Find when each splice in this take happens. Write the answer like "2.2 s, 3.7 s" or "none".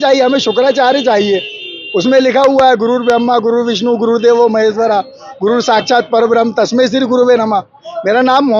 none